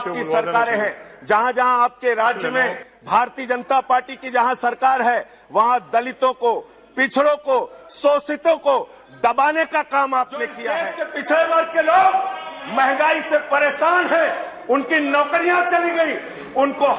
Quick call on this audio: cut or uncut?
cut